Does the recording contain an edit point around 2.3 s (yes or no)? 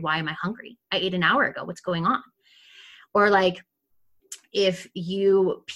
no